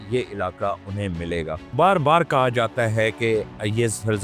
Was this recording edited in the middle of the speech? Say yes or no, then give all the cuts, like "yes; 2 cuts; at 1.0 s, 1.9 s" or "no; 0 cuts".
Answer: yes; 1 cut; at 1.6 s